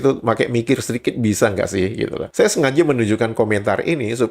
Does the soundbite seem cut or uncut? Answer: cut